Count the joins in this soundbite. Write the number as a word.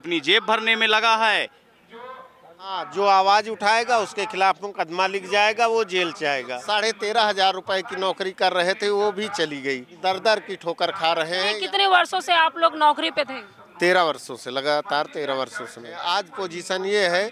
five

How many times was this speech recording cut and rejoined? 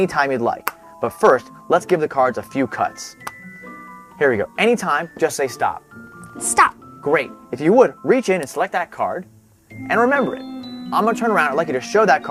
zero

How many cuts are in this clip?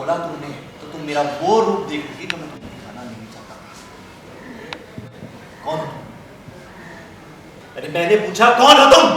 one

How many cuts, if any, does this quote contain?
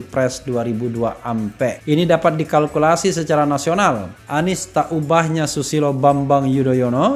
two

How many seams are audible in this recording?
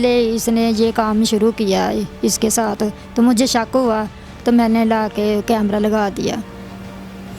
zero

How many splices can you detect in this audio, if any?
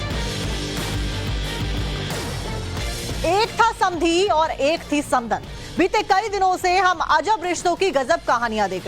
one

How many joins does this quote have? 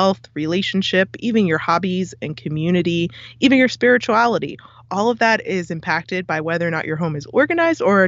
zero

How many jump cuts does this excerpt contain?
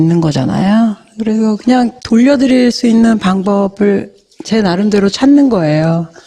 one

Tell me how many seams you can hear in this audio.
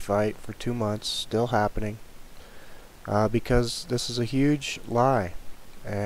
one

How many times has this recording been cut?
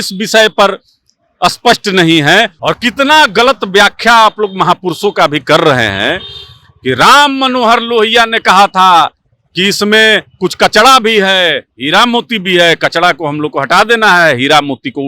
one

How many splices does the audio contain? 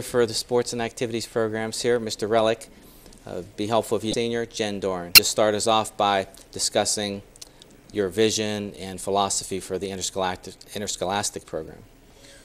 two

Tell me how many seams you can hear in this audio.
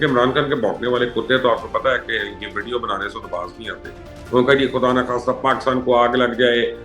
zero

